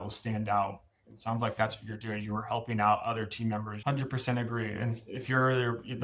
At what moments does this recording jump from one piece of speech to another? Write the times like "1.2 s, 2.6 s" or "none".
3.7 s